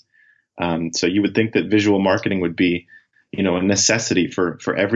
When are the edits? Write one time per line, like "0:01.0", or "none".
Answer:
none